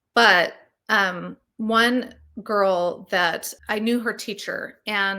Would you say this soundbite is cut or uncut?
cut